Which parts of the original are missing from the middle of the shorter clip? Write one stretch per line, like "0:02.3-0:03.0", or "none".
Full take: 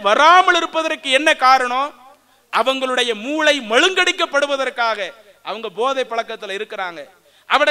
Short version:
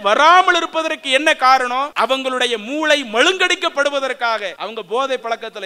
0:01.9-0:02.5
0:05.1-0:05.4

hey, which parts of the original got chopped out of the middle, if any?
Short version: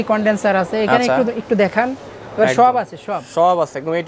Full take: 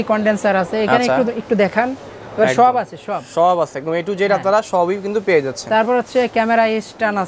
none

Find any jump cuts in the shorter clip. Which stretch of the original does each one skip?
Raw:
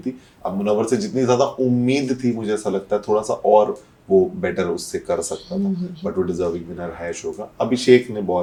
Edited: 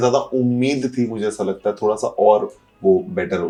none

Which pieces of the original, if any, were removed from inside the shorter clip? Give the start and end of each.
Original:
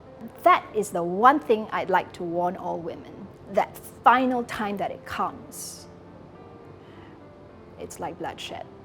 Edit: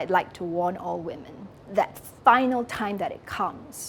none

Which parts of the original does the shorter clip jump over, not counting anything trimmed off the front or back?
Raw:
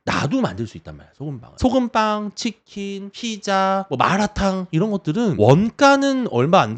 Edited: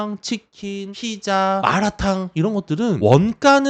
0:03.4-0:03.7

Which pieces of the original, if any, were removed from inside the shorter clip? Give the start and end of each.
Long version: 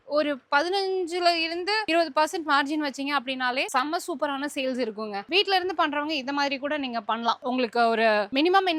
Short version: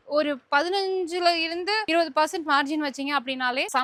none

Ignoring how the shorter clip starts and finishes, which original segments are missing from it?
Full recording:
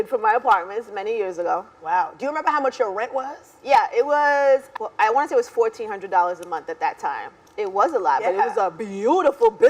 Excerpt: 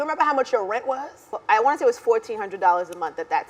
0:03.5-0:04.7

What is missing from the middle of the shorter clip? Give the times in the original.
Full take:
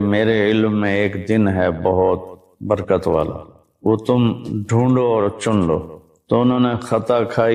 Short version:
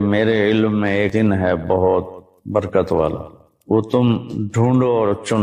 0:01.1-0:01.3

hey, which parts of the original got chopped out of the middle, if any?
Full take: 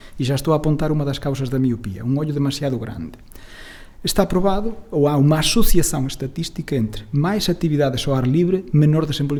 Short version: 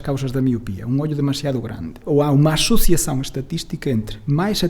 0:03.1-0:04.8

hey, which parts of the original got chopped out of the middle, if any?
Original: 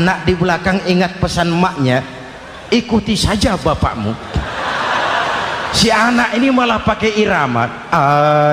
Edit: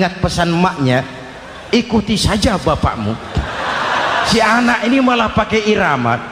0:05.3-0:05.8

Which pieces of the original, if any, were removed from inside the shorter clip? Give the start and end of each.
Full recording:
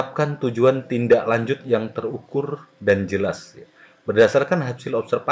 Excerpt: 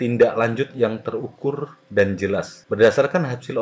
0:03.5-0:03.9

